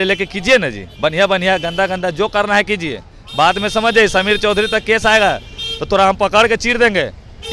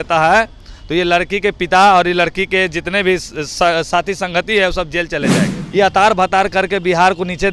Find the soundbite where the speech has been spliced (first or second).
second